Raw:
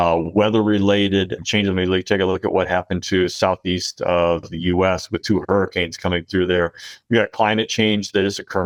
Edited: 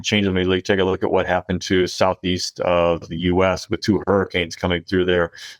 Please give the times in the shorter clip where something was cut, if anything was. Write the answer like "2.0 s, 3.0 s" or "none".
none